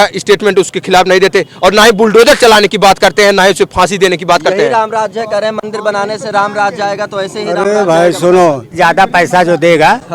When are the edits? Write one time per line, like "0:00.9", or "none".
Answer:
0:08.7